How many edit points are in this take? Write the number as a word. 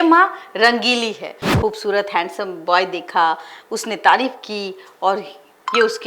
one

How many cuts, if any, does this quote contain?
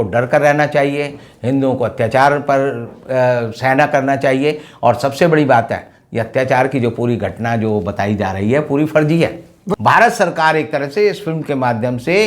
one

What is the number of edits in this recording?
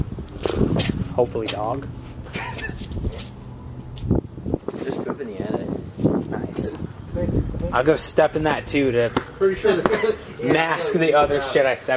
zero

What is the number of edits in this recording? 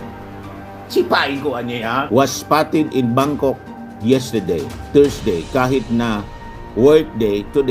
one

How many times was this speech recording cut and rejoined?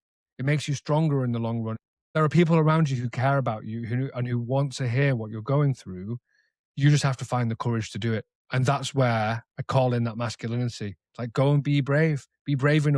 one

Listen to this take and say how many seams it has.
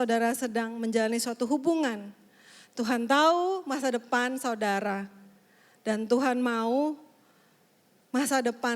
zero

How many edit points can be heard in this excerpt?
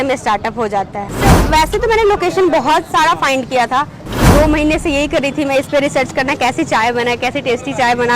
one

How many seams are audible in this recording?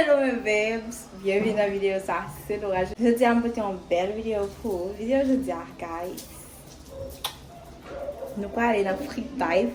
zero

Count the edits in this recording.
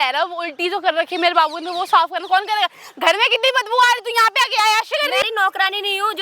one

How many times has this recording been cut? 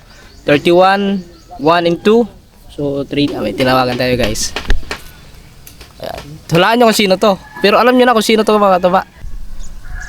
two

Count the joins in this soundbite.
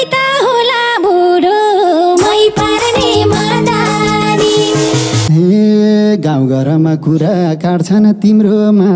one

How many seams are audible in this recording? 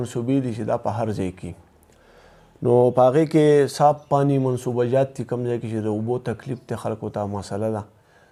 zero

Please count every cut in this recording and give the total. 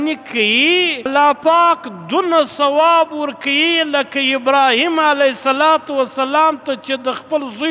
one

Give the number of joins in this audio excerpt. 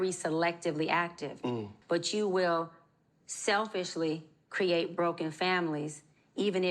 one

